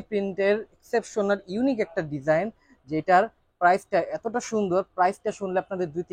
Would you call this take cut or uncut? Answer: uncut